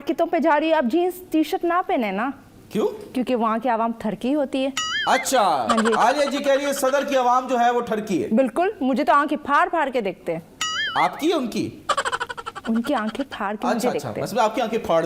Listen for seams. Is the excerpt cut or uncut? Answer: uncut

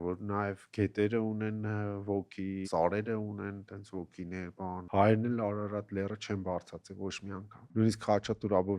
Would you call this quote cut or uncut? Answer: cut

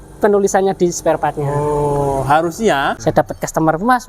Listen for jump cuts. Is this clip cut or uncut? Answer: cut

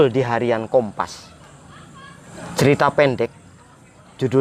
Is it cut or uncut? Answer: uncut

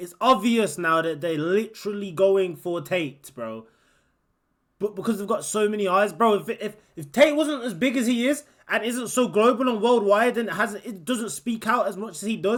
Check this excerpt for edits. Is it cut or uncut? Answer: uncut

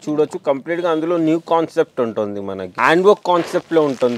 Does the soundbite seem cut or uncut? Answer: cut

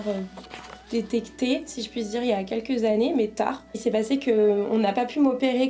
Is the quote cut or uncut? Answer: cut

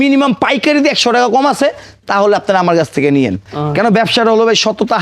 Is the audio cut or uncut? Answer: cut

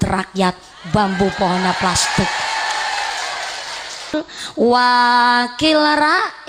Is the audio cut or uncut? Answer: cut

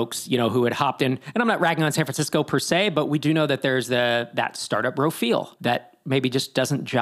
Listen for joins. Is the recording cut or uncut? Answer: cut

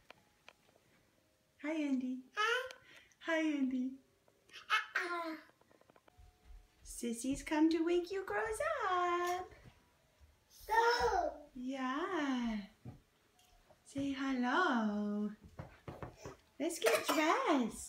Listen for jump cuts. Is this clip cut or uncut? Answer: uncut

